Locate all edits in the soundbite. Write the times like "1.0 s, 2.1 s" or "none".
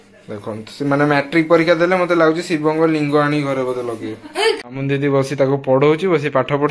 4.7 s